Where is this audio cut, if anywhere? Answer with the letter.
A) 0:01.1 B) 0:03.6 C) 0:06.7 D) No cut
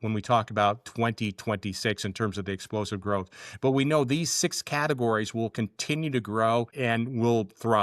C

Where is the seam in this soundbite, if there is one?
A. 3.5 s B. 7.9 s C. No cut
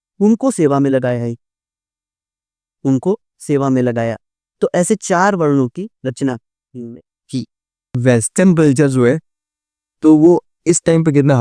B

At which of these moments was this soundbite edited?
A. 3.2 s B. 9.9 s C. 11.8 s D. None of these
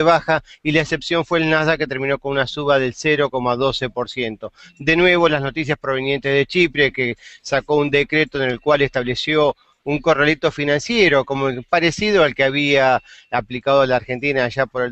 A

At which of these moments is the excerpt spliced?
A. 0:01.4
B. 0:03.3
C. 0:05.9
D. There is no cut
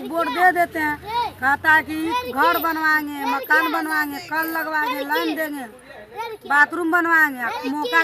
D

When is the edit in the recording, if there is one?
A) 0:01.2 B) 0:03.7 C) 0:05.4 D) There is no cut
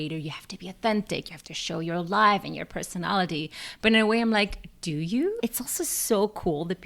C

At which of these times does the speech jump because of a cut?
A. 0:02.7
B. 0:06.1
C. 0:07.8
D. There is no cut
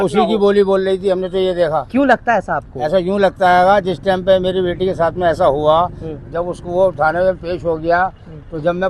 D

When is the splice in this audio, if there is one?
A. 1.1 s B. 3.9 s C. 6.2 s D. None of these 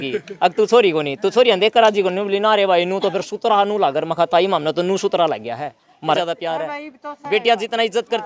C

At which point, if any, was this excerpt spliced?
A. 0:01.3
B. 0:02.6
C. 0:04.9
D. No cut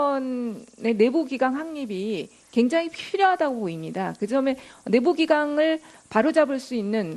C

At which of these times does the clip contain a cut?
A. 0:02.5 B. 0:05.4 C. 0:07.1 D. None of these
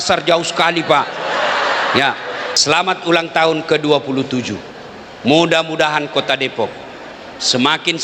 A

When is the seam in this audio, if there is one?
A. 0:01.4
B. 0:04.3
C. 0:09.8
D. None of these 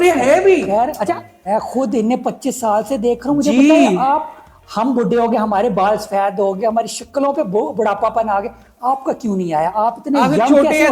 A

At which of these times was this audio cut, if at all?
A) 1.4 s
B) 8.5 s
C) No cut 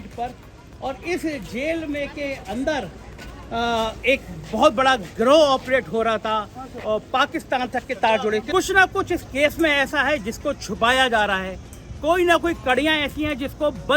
B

